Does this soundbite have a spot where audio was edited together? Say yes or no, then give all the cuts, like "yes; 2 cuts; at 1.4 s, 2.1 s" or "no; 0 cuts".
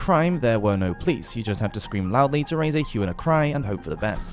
no; 0 cuts